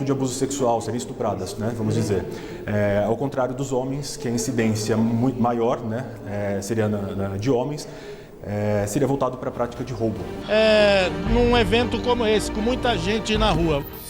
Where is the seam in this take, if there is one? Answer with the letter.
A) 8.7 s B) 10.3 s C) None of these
B